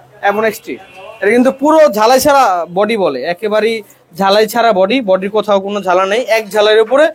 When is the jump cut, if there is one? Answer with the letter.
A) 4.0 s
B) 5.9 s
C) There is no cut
C